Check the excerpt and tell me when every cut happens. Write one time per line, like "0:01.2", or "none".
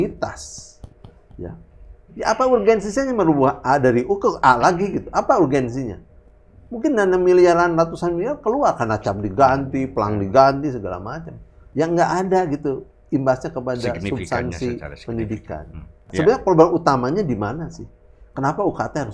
0:16.1